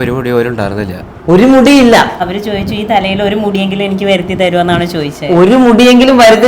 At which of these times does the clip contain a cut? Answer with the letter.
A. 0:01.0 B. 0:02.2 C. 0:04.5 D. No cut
B